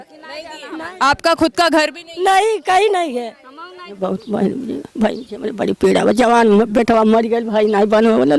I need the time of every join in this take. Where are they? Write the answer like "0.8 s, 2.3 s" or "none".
3.9 s